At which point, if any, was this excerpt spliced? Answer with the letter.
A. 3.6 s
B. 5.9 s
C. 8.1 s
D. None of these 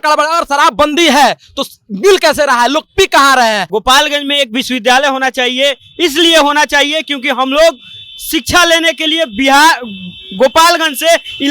A